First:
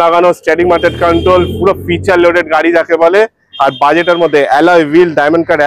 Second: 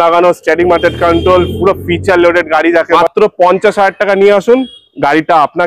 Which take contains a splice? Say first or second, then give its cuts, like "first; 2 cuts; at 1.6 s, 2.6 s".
second; 1 cut; at 3.0 s